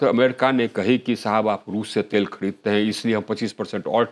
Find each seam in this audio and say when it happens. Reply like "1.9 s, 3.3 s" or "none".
none